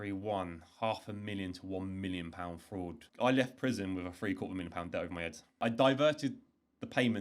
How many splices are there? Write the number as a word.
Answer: two